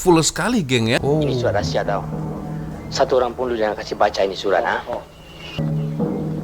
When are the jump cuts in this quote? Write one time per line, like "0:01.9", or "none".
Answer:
0:01.0